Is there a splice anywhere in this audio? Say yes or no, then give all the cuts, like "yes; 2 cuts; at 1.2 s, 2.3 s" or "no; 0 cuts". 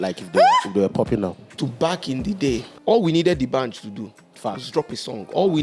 yes; 2 cuts; at 1.6 s, 2.7 s